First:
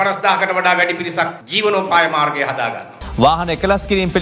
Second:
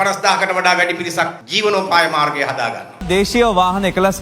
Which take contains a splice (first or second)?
first